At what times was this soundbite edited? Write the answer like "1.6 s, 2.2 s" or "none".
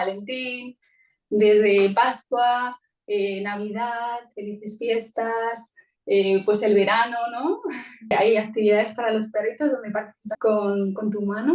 8.1 s, 10.2 s